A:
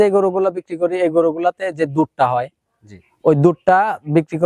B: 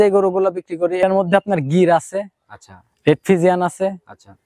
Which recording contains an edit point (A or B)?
B